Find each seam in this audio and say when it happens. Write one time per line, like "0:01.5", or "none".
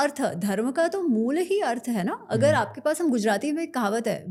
none